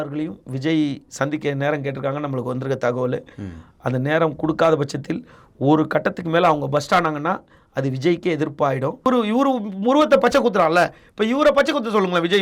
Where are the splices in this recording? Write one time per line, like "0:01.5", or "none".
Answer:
0:09.1

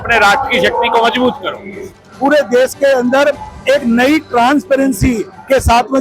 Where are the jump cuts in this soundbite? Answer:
0:02.0

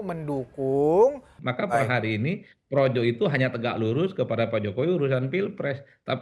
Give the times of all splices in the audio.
0:01.3

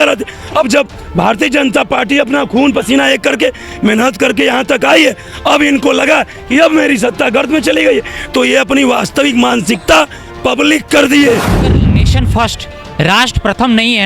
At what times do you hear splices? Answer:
0:12.0

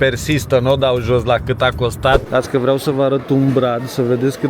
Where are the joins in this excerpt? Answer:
0:02.3

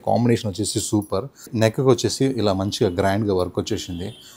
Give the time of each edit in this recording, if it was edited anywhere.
0:01.5

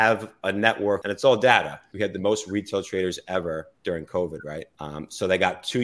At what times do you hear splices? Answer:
0:01.0
0:01.8
0:04.8

